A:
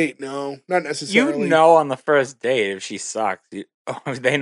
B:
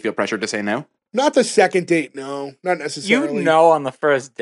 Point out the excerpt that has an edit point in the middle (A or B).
B